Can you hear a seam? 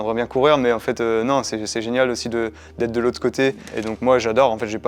yes; 1 cut; at 3.7 s

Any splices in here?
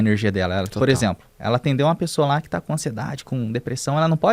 yes; 1 cut; at 1.3 s

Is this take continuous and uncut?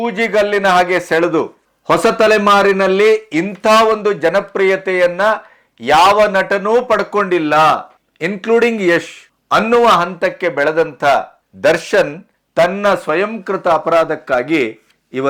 yes; 0 cuts

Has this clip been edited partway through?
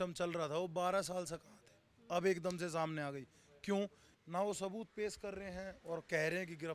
yes; 1 cut; at 4.1 s

